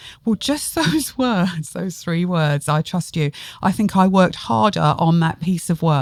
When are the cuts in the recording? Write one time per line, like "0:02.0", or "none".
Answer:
none